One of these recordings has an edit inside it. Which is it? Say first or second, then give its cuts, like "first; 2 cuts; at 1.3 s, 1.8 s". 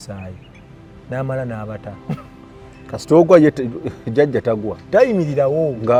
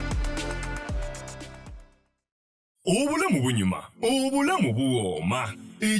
second; 1 cut; at 2.8 s